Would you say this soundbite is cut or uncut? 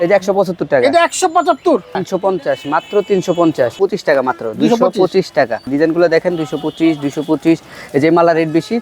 cut